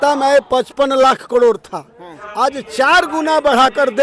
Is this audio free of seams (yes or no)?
yes